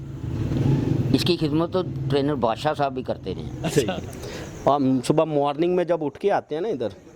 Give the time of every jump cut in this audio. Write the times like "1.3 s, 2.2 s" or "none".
3.7 s